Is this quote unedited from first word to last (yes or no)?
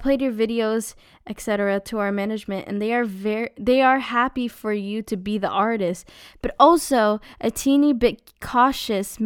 yes